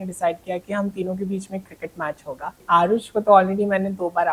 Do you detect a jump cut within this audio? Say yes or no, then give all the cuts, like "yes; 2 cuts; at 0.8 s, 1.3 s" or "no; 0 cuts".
yes; 1 cut; at 2.6 s